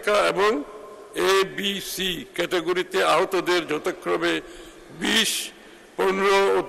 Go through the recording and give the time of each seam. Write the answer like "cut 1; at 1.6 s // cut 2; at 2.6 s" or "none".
none